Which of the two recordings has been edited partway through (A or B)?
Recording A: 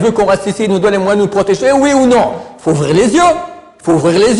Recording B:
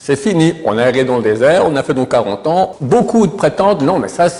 B